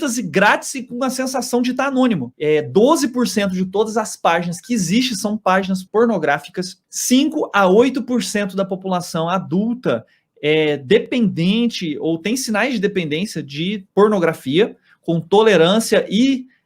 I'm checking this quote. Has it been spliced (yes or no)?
yes